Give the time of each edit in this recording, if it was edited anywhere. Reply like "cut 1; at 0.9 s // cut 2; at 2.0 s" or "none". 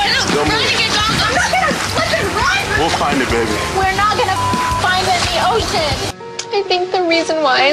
cut 1; at 2.4 s